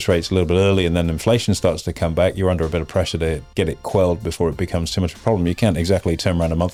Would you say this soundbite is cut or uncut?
uncut